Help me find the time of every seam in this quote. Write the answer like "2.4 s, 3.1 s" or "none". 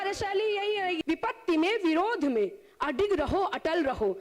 1.0 s